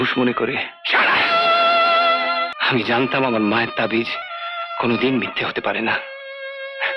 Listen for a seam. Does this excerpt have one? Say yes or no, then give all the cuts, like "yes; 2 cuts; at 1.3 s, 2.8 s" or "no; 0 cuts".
yes; 1 cut; at 2.5 s